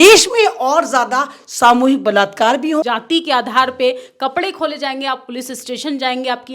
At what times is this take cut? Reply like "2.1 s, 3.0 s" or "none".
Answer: 2.8 s